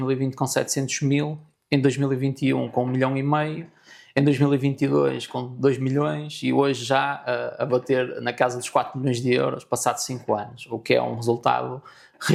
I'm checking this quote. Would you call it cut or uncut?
uncut